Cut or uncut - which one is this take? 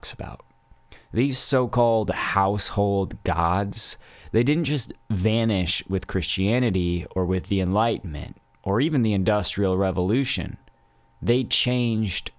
uncut